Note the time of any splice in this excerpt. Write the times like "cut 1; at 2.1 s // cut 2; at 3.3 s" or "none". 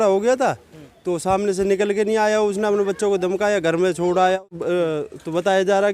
cut 1; at 4.5 s